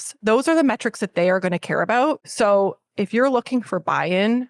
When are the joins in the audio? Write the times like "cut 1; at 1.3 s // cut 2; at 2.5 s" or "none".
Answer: cut 1; at 2.2 s